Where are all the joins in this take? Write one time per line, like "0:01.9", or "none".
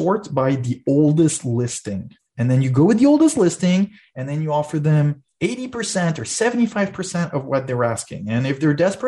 none